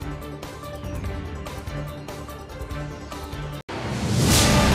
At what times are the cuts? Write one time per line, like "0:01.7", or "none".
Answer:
0:01.1
0:03.6